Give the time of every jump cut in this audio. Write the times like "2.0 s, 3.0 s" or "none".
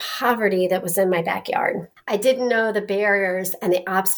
1.9 s